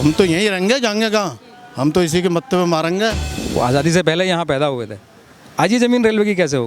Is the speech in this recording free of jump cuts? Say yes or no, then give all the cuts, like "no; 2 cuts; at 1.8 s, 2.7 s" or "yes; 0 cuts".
no; 1 cut; at 3.3 s